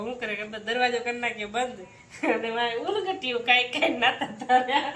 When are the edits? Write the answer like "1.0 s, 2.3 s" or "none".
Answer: none